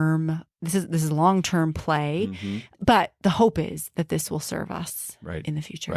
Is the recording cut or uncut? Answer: cut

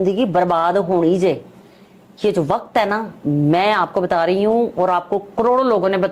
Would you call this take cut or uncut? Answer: uncut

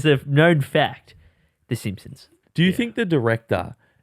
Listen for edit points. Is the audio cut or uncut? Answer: cut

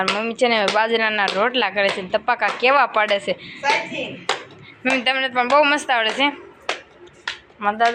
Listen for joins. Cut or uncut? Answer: uncut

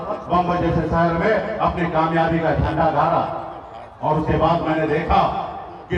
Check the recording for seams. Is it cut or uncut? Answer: uncut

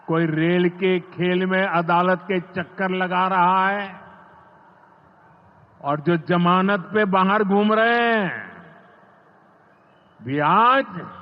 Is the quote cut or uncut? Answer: uncut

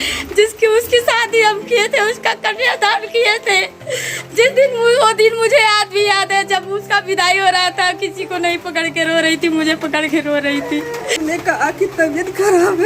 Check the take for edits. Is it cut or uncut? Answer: cut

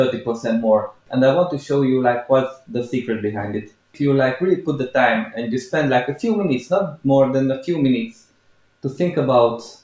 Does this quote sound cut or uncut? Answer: cut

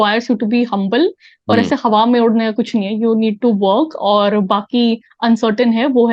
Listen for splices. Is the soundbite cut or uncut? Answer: uncut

